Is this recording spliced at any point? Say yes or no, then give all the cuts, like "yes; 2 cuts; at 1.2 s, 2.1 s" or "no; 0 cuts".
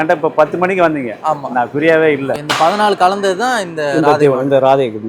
yes; 1 cut; at 2.3 s